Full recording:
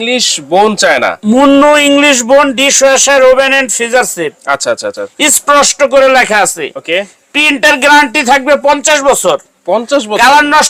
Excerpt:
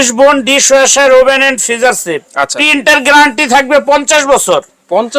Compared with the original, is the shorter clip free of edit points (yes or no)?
no